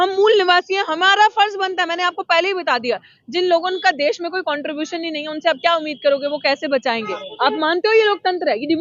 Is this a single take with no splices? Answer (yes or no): no